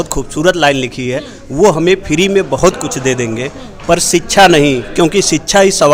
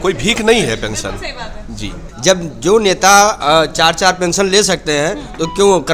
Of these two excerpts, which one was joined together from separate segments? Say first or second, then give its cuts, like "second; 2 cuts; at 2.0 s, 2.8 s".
second; 1 cut; at 2.1 s